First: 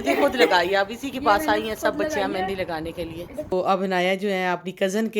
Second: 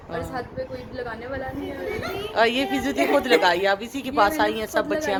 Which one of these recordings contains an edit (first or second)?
first